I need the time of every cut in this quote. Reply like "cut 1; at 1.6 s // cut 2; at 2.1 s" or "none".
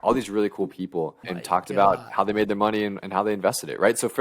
cut 1; at 1.3 s